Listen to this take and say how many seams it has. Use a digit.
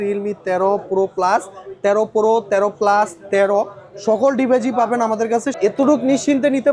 1